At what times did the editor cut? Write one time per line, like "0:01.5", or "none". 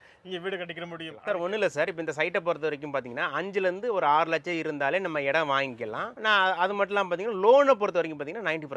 0:01.2